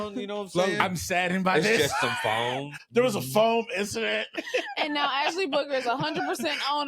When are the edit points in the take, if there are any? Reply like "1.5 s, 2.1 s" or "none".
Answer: 2.7 s, 4.4 s